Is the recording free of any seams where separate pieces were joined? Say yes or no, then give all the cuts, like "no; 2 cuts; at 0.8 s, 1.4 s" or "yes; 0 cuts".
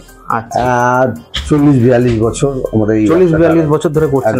yes; 0 cuts